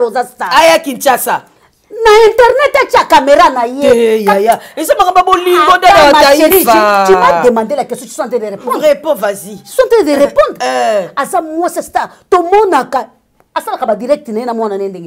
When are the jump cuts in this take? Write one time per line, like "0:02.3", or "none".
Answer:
none